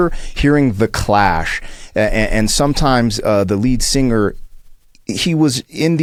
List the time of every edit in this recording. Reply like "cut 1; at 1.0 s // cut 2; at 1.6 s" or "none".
none